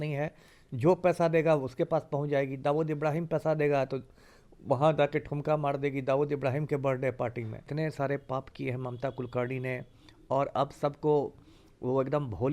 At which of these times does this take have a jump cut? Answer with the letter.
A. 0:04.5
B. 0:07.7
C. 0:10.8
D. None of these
B